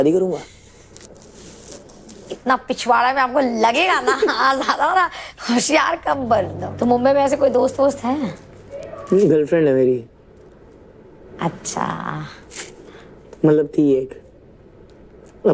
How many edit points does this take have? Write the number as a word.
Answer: one